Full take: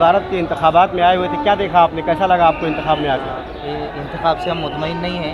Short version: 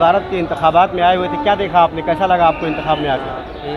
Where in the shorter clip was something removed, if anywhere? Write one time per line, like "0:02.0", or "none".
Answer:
none

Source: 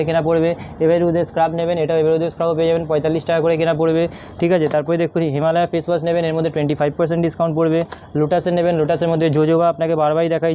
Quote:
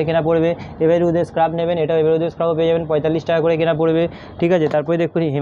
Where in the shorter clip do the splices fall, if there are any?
none

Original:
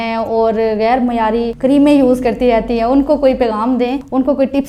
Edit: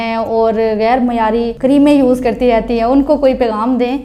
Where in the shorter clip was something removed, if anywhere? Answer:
none

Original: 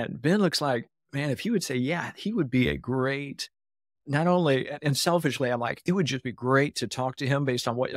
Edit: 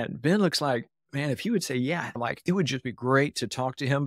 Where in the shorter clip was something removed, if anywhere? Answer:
0:02.2

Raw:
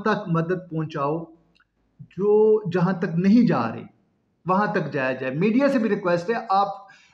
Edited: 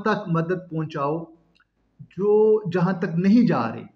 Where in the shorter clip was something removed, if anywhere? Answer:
none

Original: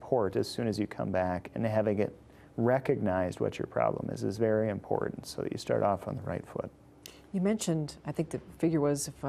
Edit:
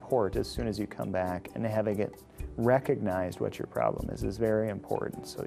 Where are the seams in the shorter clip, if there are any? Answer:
none

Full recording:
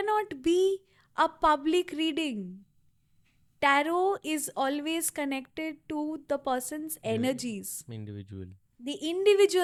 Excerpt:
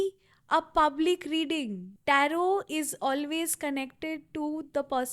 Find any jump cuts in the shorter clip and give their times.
0:01.9

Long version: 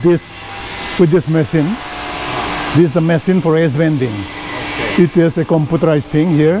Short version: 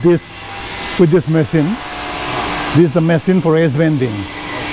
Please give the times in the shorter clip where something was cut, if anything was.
none

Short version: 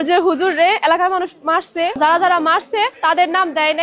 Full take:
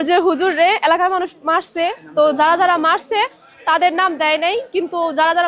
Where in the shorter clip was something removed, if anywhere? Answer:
0:02.0
0:02.9

